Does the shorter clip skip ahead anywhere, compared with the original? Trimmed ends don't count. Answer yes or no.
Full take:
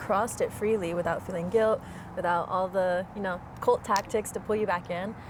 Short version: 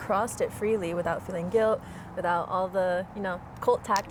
no